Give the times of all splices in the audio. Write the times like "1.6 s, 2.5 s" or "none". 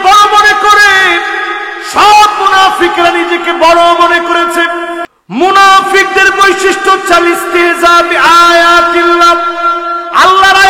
5.1 s